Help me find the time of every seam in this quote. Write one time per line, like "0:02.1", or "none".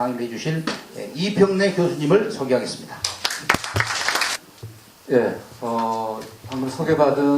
0:04.3